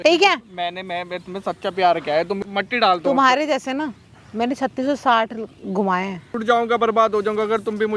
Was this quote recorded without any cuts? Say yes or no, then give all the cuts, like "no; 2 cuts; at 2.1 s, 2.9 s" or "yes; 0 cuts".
no; 2 cuts; at 2.4 s, 6.3 s